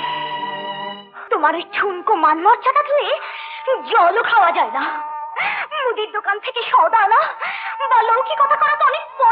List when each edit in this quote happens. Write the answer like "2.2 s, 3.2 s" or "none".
1.1 s